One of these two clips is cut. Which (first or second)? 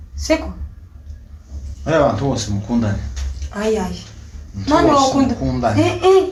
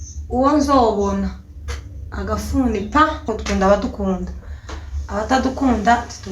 second